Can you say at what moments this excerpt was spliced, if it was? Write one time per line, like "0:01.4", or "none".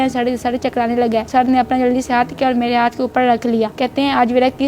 0:01.3
0:03.7